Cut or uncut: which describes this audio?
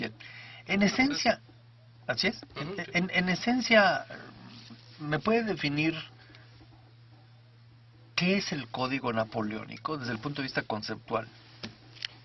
uncut